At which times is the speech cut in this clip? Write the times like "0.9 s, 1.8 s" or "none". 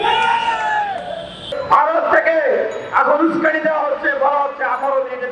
1.5 s